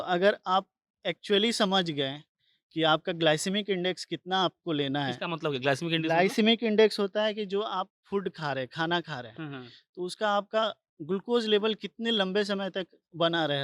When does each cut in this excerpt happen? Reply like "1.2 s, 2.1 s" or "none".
none

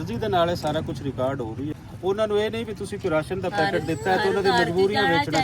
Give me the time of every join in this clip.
1.7 s

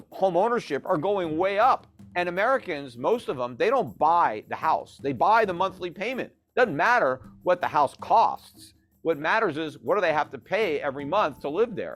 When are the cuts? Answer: 2.0 s

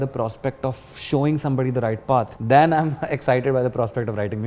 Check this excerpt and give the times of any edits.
2.3 s

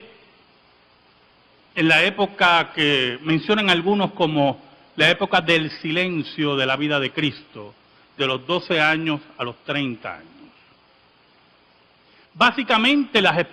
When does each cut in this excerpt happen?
9.8 s

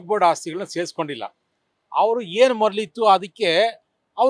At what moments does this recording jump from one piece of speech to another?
none

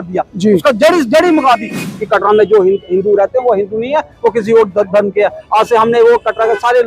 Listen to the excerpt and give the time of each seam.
1.8 s

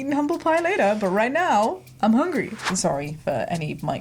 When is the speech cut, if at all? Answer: 2.6 s

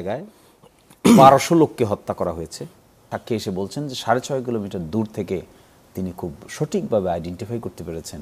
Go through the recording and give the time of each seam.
3.1 s

